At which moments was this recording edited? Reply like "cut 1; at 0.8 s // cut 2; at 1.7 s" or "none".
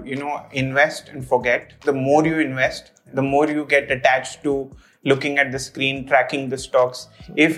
cut 1; at 1.7 s